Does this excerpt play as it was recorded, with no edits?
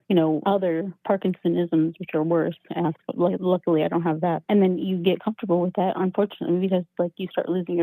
yes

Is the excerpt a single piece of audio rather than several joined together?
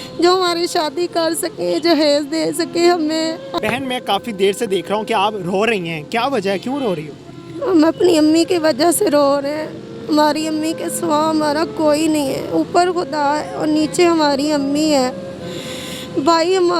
no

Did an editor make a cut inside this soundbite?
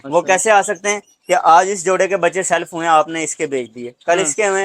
no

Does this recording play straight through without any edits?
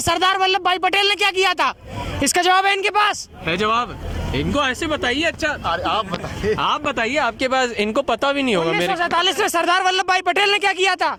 yes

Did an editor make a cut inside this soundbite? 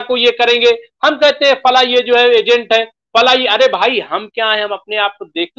no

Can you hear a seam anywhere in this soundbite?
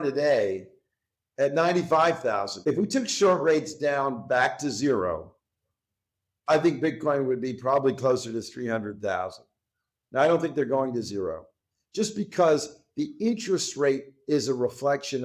yes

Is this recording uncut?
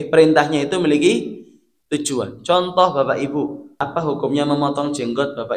no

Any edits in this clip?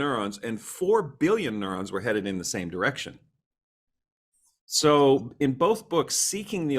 no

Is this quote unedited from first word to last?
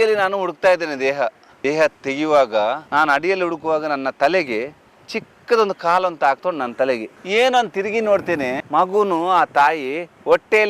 yes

